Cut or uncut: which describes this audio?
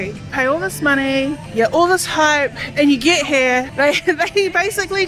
uncut